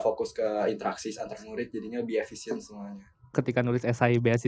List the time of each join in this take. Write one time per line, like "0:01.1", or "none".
0:03.3